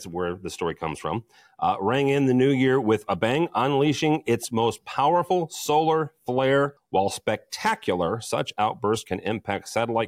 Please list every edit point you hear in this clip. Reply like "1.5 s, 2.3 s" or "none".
6.8 s